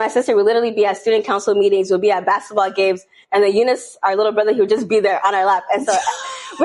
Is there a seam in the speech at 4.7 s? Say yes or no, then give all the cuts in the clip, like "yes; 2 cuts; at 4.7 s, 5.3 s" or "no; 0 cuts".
no; 0 cuts